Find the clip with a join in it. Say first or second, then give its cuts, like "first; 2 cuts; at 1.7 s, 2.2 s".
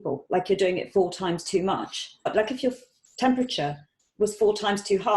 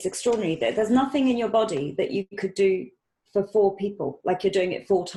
first; 1 cut; at 2.3 s